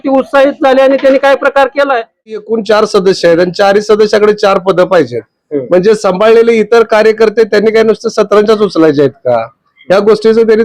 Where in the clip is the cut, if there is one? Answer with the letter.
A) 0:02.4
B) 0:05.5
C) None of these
A